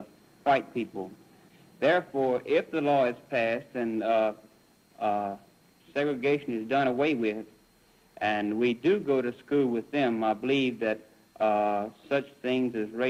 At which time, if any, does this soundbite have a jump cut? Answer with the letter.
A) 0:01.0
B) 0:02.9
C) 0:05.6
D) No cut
D